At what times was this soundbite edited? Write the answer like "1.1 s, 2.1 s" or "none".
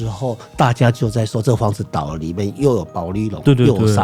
none